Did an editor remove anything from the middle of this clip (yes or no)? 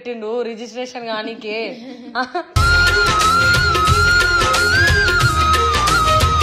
no